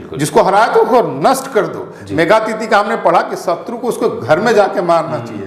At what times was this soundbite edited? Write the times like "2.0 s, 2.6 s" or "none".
none